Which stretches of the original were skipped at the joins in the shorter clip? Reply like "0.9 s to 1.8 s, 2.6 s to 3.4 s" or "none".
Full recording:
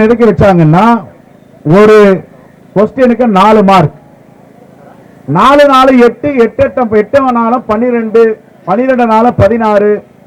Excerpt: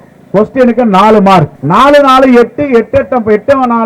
4.0 s to 5.2 s